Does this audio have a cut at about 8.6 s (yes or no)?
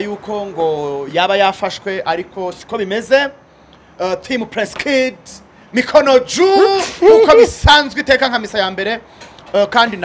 no